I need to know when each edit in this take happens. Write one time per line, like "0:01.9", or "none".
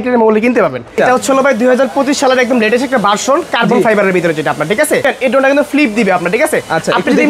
0:01.0
0:05.0